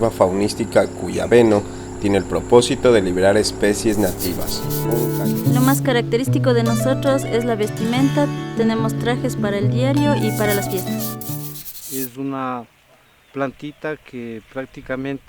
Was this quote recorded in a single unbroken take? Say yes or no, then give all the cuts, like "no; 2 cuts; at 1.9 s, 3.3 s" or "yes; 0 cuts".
no; 2 cuts; at 4.8 s, 11.2 s